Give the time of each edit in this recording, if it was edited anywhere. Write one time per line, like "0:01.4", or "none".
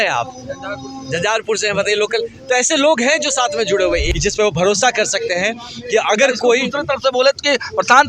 0:04.1